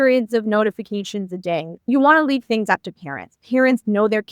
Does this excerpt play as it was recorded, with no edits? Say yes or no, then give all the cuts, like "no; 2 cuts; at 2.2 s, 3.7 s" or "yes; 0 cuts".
no; 1 cut; at 1.9 s